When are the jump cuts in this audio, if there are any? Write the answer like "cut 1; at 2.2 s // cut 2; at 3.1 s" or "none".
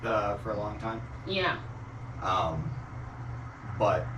none